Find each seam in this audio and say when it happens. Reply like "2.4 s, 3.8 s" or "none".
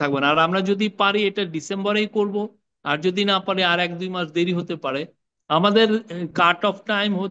5.2 s